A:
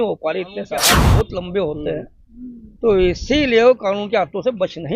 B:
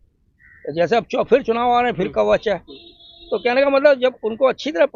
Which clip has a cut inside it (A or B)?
A